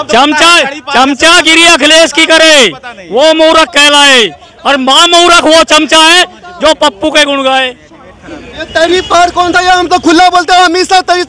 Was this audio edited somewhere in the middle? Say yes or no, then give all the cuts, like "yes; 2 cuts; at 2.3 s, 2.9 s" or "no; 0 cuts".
no; 0 cuts